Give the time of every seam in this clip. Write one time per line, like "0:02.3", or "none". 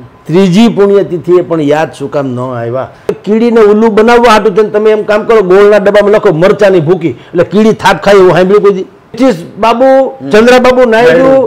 0:03.2
0:09.2